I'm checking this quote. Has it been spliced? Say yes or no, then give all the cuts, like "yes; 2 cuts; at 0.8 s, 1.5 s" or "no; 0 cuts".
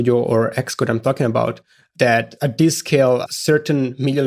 yes; 2 cuts; at 2.1 s, 3.3 s